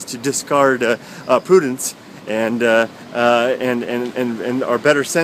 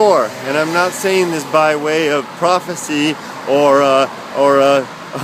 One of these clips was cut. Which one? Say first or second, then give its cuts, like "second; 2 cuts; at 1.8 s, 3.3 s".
first; 1 cut; at 1.6 s